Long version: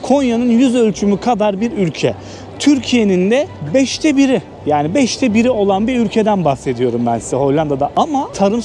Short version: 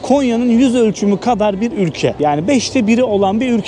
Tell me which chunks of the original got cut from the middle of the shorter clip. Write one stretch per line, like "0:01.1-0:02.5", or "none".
0:02.2-0:04.6